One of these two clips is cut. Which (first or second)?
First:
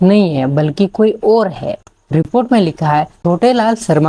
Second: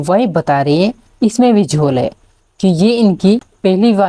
first